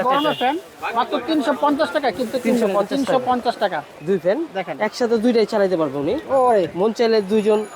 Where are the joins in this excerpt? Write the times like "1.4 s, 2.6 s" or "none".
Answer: 3.9 s